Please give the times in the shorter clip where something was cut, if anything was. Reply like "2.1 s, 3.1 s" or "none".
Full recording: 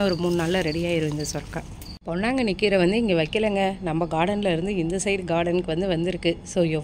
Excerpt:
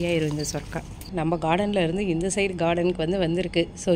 1.1 s